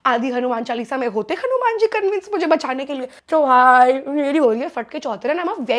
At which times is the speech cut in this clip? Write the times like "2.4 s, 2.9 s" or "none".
none